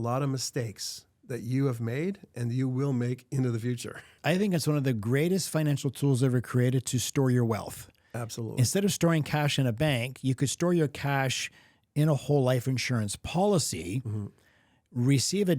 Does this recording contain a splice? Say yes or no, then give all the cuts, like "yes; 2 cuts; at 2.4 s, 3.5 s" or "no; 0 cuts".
yes; 1 cut; at 4.1 s